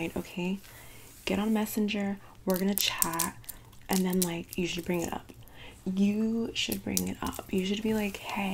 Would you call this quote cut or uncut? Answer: uncut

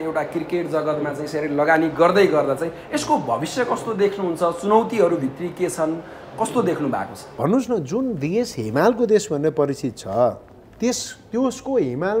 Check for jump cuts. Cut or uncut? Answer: cut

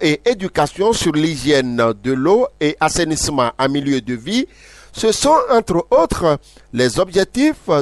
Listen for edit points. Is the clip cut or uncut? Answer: uncut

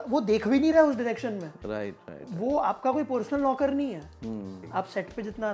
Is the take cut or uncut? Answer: cut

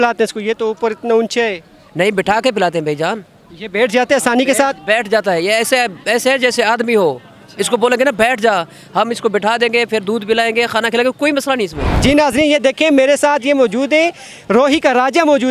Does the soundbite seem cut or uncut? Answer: cut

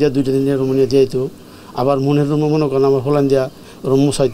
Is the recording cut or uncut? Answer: uncut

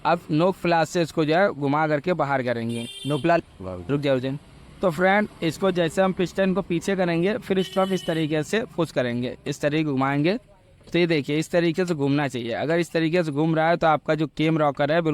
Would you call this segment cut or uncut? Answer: uncut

